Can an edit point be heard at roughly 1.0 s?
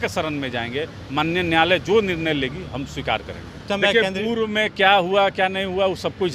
no; 1 cut; at 3.6 s

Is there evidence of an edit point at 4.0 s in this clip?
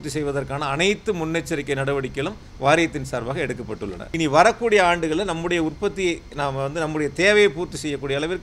yes; 1 cut; at 4.0 s

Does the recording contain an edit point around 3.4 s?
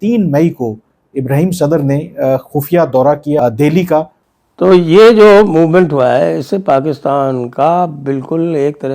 yes; 2 cuts; at 3.4 s, 4.2 s

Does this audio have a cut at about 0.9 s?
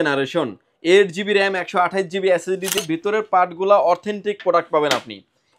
no; 1 cut; at 2.8 s

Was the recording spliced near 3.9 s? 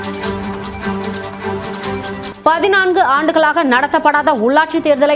no; 1 cut; at 2.3 s

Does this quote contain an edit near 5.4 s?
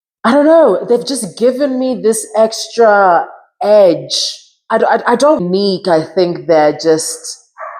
yes; 1 cut; at 5.4 s

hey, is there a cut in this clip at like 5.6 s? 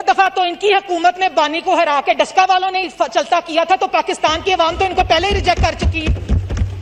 no; 0 cuts

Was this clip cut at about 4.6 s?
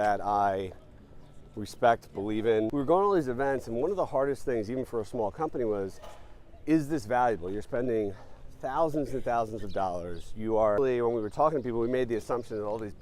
no; 2 cuts; at 2.7 s, 10.8 s

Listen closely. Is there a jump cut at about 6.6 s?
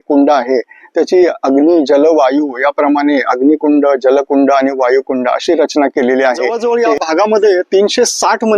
yes; 1 cut; at 6.6 s

